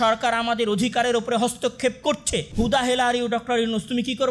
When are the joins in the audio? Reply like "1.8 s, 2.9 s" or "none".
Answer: 2.4 s